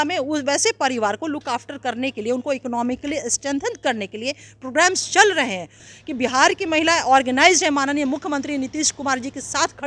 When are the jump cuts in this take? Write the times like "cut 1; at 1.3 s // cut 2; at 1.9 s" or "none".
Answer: cut 1; at 5.8 s

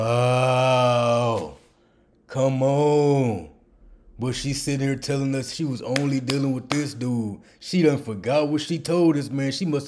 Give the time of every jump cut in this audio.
none

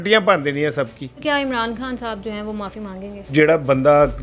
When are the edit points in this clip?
cut 1; at 1.0 s // cut 2; at 3.3 s

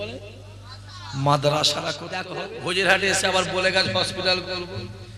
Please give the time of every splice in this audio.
cut 1; at 2.1 s

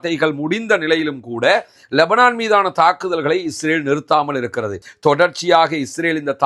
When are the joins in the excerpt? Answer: cut 1; at 4.8 s

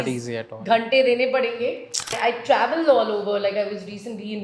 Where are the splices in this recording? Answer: cut 1; at 2.2 s

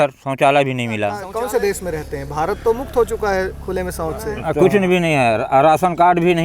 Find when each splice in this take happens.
cut 1; at 1.2 s // cut 2; at 4.3 s

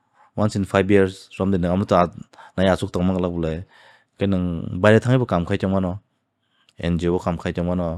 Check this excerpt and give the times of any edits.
none

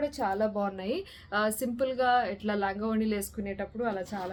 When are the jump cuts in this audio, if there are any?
none

